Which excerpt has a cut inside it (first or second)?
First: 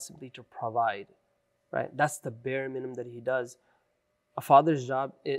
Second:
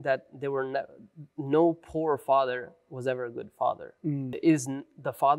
second